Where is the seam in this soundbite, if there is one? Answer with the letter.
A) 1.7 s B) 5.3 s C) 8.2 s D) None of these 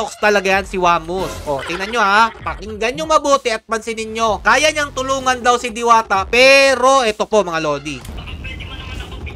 C